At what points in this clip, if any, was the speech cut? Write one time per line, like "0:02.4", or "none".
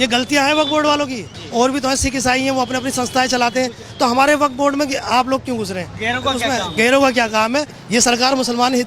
0:01.4
0:03.9
0:07.8